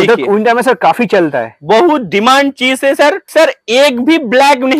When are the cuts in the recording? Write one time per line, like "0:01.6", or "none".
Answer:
0:03.3